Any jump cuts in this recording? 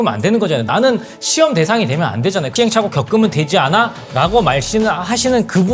yes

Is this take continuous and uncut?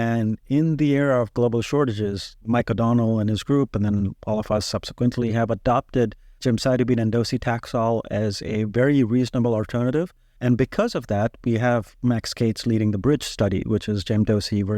no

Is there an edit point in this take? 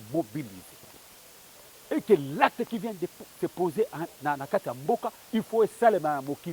no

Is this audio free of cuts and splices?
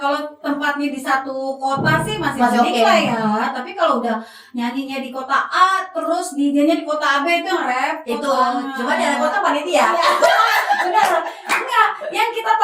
yes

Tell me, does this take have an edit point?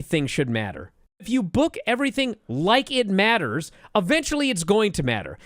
yes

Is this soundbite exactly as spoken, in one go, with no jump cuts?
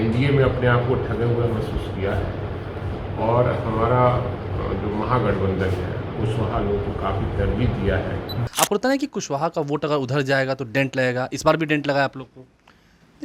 no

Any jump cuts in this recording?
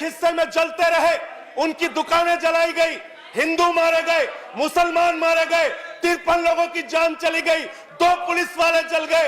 no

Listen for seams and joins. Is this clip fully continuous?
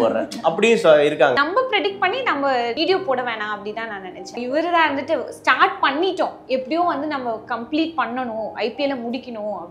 no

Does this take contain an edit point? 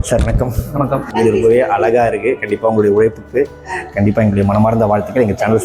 yes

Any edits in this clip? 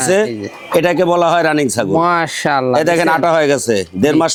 no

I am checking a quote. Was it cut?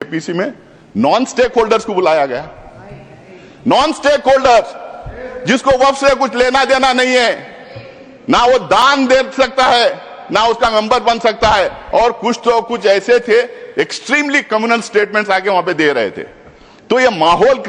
yes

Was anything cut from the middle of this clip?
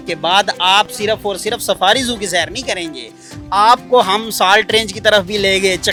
no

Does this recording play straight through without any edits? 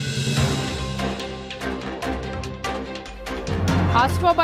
yes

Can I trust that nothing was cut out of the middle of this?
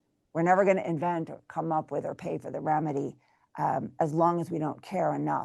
yes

